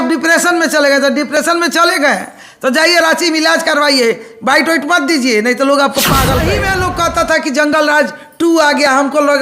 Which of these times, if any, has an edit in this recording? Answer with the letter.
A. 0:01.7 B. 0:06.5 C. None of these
B